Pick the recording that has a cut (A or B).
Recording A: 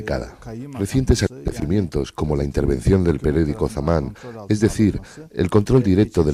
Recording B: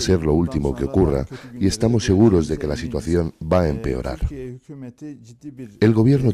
B